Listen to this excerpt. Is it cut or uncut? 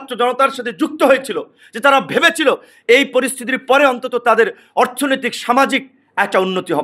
uncut